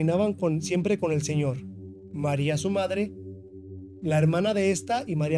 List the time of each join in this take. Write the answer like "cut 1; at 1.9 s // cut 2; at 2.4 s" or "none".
none